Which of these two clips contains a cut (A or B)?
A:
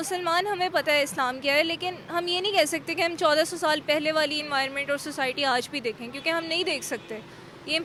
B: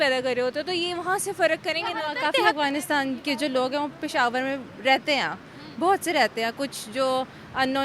B